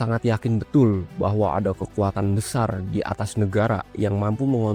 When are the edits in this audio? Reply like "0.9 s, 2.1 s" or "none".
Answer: none